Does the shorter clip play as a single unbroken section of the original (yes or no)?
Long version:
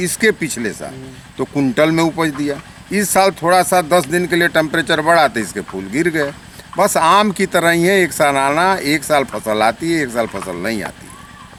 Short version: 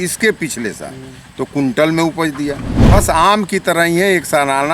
no